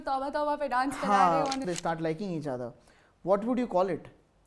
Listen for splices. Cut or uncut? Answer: cut